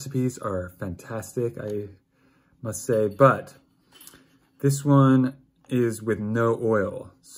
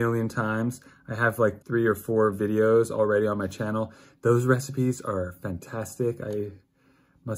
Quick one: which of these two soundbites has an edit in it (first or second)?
second